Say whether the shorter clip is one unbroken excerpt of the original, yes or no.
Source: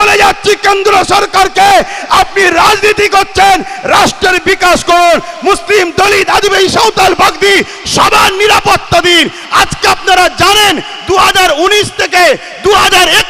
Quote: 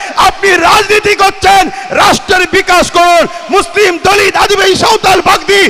yes